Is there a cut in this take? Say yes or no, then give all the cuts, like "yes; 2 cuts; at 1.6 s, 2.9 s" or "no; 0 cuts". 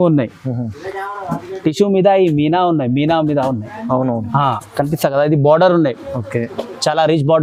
no; 0 cuts